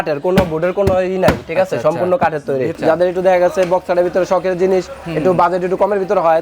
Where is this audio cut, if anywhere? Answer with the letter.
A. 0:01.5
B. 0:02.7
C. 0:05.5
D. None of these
B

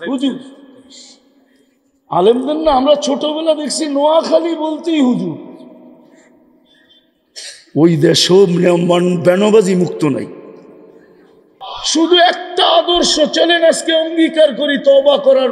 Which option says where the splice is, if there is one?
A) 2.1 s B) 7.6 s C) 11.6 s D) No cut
C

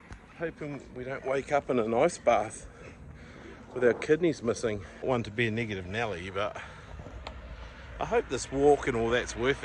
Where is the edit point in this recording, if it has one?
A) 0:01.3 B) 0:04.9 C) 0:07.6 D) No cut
B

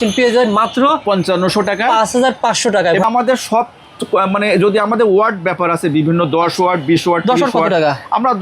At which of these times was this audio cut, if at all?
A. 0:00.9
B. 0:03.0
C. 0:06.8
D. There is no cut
B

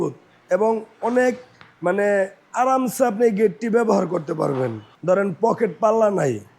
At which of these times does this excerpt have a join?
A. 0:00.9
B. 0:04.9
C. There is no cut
B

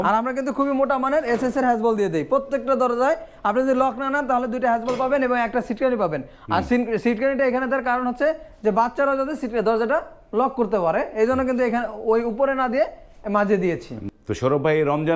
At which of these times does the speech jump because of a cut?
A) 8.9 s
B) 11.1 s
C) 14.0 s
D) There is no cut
C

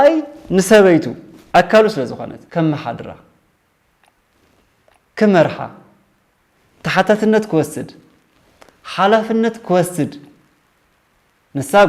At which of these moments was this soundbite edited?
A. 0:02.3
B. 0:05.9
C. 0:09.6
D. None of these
A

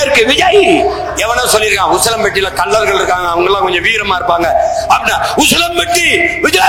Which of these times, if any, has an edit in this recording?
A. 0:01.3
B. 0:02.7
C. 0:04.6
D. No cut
D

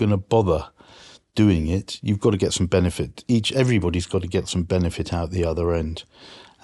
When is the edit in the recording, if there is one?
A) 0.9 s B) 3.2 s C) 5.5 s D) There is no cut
D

